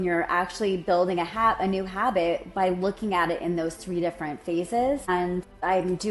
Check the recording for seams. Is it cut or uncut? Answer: cut